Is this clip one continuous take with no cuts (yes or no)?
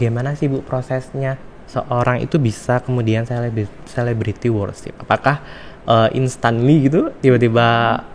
no